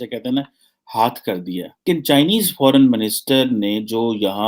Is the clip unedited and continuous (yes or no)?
no